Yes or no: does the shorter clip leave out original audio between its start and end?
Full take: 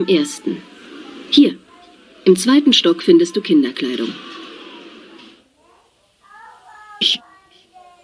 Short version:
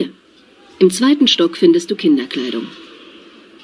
yes